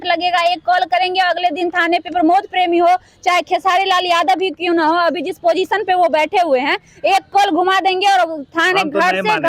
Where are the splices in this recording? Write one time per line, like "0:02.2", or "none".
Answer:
none